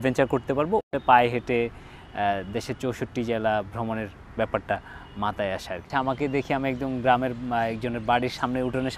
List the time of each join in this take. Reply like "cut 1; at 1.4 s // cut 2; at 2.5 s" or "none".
cut 1; at 1.0 s // cut 2; at 5.9 s